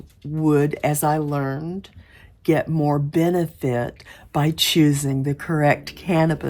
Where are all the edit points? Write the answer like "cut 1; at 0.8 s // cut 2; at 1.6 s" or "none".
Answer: none